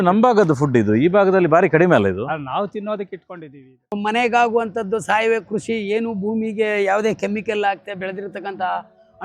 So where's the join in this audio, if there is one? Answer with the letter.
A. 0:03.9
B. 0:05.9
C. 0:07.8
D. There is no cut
A